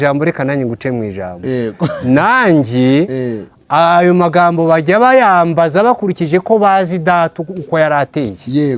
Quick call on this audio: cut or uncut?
uncut